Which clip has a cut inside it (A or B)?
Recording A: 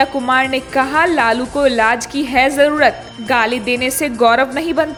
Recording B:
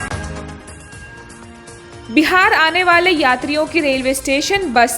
B